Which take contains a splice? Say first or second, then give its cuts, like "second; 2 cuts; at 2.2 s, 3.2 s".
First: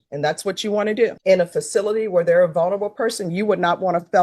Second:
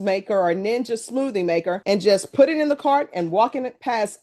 first; 1 cut; at 1.2 s